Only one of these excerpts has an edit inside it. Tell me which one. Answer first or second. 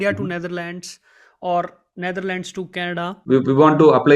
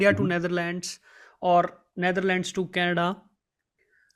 first